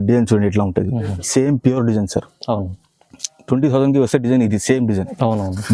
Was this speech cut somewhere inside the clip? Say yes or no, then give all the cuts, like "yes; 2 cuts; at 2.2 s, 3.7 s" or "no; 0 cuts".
no; 0 cuts